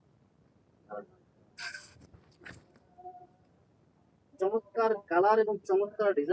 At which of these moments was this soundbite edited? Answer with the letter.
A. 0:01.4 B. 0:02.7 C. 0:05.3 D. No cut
D